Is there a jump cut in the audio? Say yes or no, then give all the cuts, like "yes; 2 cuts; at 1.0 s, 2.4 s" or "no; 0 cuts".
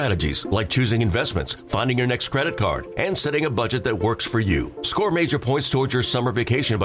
no; 0 cuts